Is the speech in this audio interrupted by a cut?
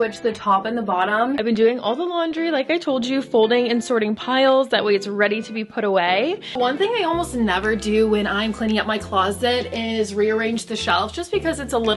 yes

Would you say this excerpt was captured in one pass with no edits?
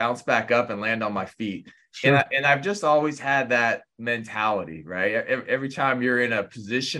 yes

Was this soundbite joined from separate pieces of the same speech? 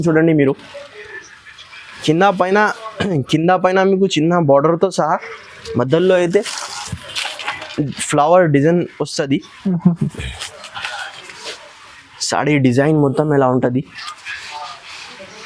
no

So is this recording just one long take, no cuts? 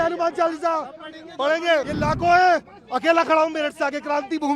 no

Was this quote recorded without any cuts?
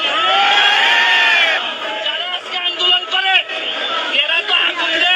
no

